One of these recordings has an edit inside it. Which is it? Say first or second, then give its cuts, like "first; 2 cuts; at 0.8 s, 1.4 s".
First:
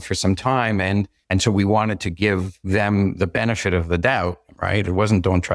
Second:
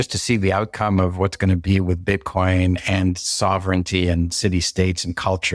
first; 3 cuts; at 1.2 s, 2.5 s, 4.5 s